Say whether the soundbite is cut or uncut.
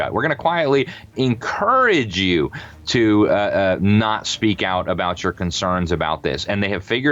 uncut